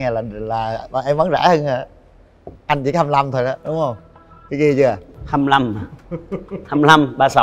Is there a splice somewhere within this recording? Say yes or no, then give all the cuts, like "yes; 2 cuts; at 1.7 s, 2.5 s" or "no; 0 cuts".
no; 0 cuts